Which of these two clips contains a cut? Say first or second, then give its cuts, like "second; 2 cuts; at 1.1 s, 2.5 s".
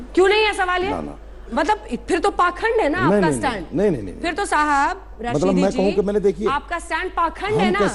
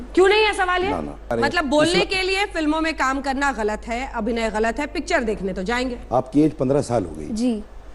second; 2 cuts; at 1.3 s, 6.0 s